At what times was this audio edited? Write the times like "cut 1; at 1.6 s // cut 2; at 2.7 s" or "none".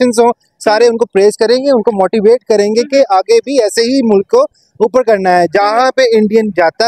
none